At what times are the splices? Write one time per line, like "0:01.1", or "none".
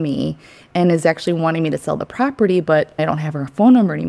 0:03.0